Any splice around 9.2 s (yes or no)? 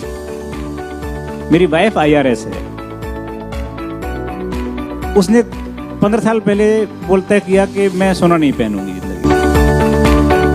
yes